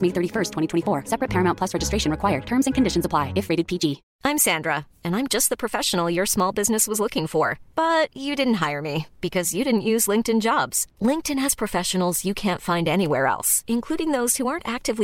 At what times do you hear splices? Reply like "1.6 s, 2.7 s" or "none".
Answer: 4.1 s